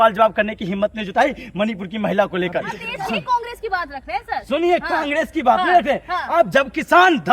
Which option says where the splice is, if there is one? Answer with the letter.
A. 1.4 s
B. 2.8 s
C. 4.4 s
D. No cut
B